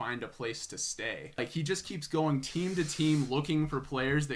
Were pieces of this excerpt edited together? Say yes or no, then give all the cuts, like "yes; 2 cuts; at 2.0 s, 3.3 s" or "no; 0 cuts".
yes; 1 cut; at 1.4 s